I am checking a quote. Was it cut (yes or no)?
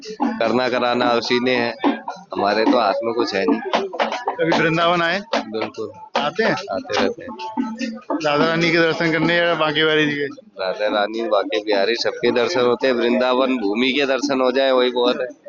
no